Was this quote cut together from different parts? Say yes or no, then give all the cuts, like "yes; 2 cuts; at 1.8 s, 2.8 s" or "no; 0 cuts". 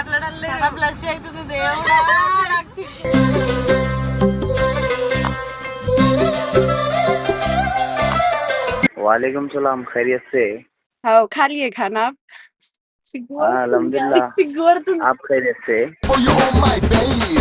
yes; 1 cut; at 8.9 s